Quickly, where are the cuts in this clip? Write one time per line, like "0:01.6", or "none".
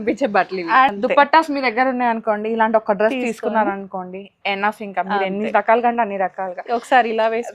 0:00.9